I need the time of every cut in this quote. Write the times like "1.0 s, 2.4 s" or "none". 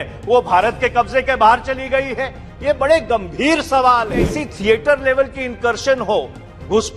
4.4 s